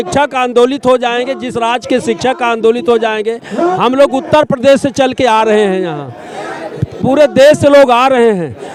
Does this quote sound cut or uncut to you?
uncut